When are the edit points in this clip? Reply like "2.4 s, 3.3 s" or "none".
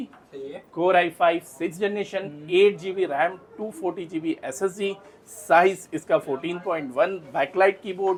none